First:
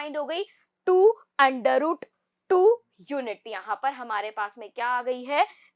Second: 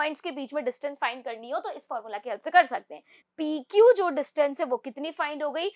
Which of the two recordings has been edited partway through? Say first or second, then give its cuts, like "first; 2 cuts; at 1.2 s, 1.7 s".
second; 1 cut; at 3.2 s